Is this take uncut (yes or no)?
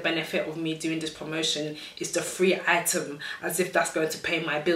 yes